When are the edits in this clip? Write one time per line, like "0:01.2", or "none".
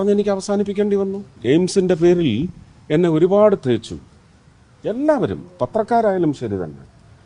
0:01.4